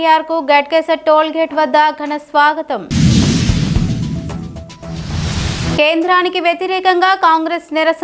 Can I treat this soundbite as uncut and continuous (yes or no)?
yes